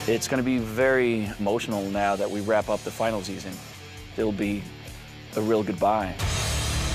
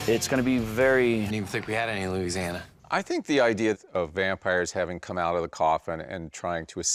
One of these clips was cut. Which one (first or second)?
first